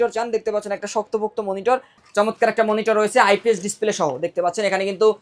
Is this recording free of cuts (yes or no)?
no